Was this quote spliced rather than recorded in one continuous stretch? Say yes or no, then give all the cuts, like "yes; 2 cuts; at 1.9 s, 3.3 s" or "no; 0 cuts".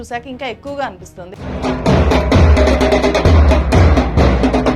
yes; 1 cut; at 1.3 s